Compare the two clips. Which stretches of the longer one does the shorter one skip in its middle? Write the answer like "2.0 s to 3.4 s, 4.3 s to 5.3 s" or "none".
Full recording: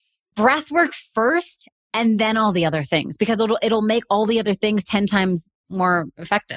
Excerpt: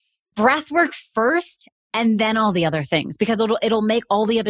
none